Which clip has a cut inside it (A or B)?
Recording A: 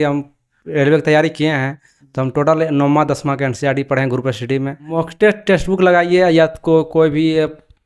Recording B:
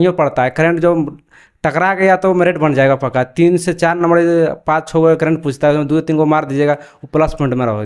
A